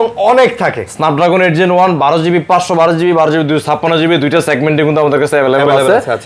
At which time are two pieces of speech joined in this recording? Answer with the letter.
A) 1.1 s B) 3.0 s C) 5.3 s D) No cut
D